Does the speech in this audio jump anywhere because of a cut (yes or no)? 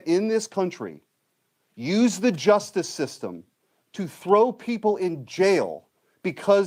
no